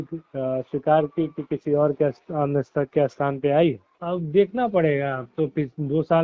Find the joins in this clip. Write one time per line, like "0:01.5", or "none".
0:03.9

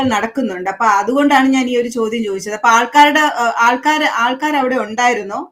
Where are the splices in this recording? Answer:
none

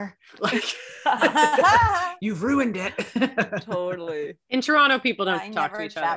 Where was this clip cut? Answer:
none

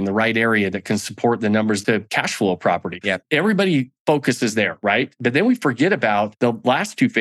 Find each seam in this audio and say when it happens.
0:01.8
0:03.1
0:06.3

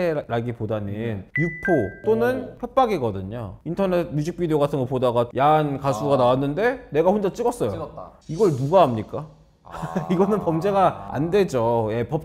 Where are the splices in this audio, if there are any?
0:03.6

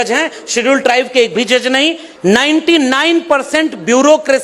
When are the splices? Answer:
0:02.1

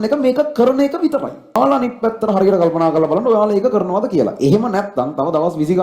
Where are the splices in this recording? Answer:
0:01.6

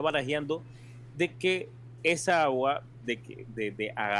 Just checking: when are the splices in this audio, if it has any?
none

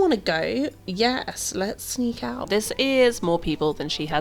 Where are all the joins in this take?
0:02.5

